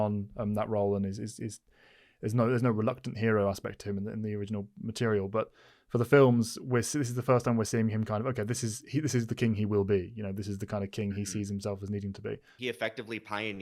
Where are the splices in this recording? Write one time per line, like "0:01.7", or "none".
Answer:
0:12.5